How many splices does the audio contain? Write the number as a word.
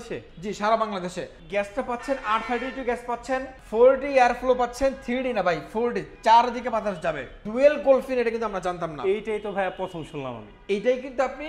three